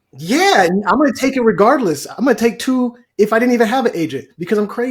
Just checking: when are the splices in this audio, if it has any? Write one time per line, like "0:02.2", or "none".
none